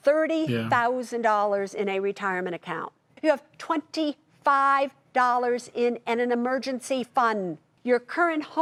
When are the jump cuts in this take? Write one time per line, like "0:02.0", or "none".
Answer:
none